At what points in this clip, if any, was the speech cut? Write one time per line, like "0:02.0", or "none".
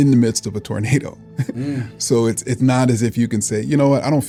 none